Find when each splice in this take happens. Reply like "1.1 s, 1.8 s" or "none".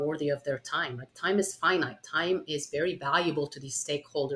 none